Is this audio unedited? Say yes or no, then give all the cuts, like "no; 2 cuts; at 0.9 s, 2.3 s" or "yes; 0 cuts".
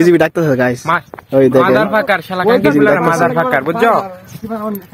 yes; 0 cuts